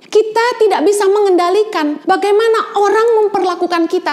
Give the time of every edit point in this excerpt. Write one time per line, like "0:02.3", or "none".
0:02.0